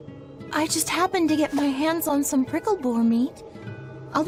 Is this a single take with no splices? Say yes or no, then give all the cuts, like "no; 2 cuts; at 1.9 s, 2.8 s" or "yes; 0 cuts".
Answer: yes; 0 cuts